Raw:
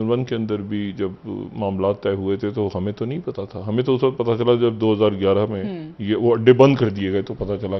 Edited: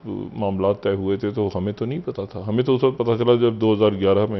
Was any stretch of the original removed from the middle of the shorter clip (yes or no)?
no